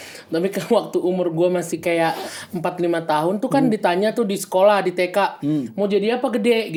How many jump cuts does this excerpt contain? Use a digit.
0